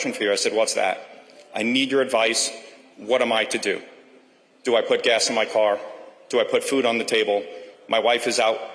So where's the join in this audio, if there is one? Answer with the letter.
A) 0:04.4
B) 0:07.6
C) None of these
C